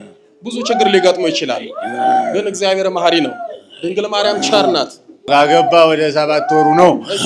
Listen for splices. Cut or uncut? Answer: cut